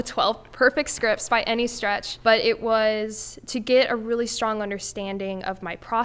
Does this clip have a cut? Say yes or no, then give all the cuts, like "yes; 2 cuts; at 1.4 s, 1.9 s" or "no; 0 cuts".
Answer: yes; 1 cut; at 2.1 s